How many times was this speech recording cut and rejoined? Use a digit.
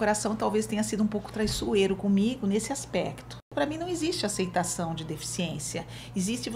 1